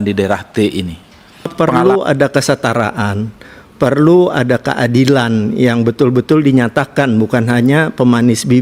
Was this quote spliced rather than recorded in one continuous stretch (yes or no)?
yes